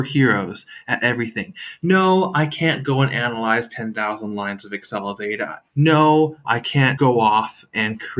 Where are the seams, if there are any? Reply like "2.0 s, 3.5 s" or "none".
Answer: 5.6 s, 6.9 s

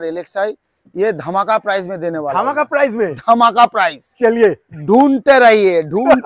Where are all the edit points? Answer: none

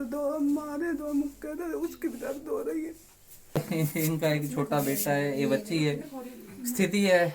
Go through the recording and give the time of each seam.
3.6 s

